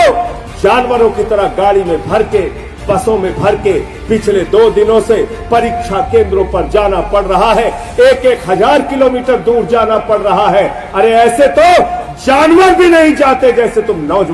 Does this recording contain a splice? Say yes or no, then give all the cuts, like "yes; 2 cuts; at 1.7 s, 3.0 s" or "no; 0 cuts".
no; 0 cuts